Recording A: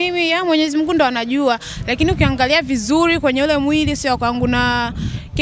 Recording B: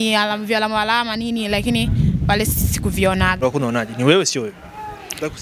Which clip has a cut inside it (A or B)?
B